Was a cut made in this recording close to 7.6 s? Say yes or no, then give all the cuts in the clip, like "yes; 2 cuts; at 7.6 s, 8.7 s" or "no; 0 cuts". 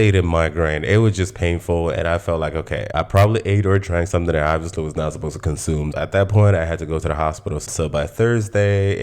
yes; 2 cuts; at 2.9 s, 7.6 s